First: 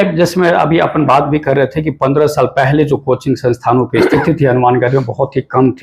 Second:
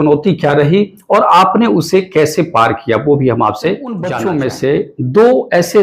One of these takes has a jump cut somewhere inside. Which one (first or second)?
second